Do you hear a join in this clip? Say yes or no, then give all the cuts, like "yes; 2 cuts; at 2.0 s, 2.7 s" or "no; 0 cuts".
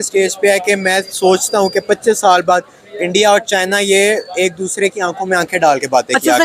no; 0 cuts